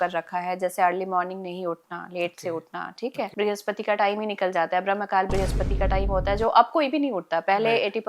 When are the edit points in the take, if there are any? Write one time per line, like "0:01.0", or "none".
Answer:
0:03.3